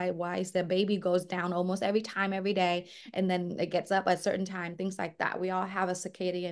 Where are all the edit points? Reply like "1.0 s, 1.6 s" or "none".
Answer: none